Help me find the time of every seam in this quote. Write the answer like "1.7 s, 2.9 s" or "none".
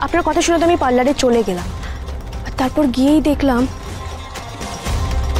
3.8 s